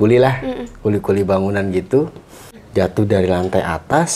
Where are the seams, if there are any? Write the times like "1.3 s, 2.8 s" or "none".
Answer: 2.6 s

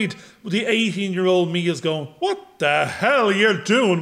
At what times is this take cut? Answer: none

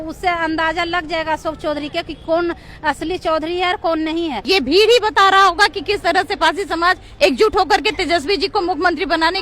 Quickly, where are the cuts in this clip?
4.4 s

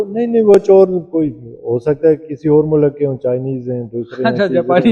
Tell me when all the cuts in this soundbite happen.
none

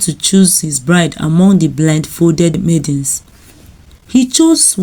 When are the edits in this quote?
2.6 s

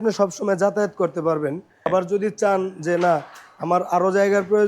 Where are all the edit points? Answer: 1.9 s

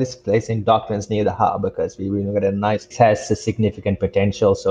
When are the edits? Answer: 2.9 s

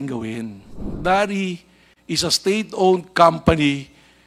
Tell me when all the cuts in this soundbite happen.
0.9 s

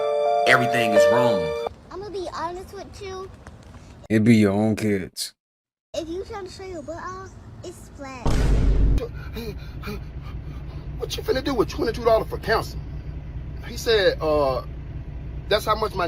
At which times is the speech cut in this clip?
1.6 s, 9.0 s

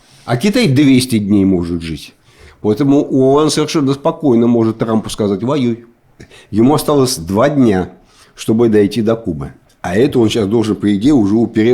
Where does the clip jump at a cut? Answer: 6.2 s

